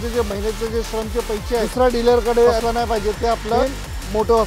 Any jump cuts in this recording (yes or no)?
yes